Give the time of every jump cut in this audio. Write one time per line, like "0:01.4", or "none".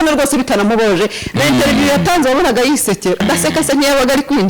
0:03.2